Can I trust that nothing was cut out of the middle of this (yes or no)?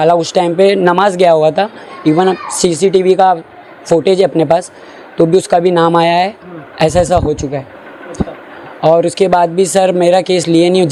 yes